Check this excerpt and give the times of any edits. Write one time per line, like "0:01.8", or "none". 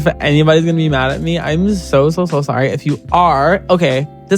none